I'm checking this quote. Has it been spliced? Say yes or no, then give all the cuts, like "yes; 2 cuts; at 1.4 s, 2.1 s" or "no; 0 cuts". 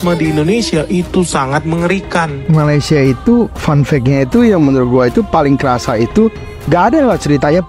yes; 2 cuts; at 2.4 s, 6.5 s